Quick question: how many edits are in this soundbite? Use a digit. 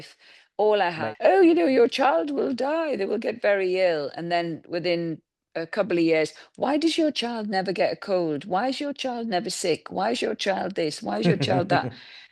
1